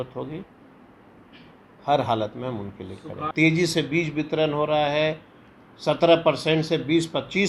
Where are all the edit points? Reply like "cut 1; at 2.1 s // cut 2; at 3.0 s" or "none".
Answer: cut 1; at 3.3 s